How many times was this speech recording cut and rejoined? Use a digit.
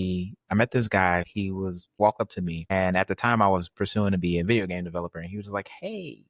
1